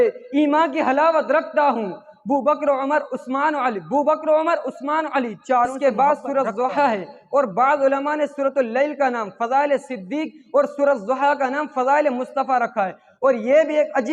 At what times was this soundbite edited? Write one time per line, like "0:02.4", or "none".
0:05.7